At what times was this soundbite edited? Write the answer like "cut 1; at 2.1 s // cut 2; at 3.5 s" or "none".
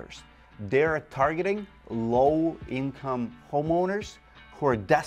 none